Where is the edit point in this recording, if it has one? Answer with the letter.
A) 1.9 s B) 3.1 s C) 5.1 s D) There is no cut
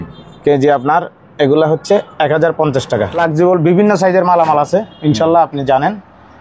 B